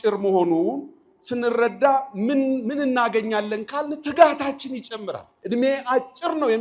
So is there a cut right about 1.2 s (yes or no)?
no